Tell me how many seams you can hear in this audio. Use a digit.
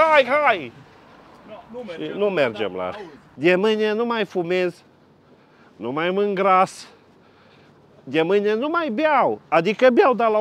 1